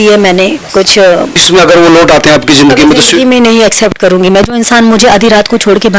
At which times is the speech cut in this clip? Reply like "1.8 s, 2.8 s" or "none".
1.4 s